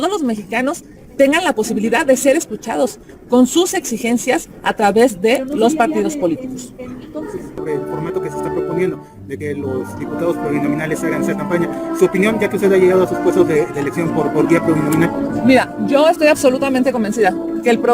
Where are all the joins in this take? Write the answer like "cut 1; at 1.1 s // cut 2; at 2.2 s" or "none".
cut 1; at 7.6 s